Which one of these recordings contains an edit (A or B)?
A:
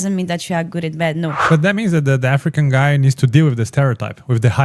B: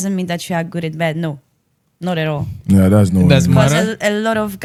A